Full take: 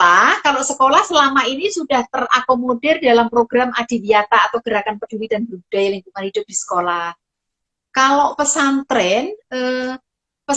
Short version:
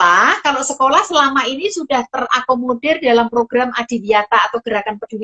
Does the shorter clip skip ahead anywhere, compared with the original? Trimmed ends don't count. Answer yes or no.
no